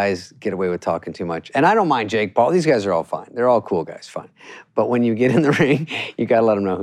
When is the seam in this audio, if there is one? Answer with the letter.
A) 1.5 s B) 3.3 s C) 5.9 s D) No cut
A